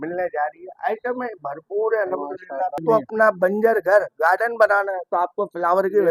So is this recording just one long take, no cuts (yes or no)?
no